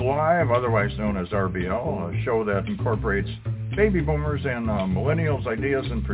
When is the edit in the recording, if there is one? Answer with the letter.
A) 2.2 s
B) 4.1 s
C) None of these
C